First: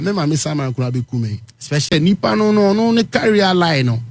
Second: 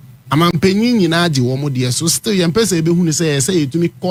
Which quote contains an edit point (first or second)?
first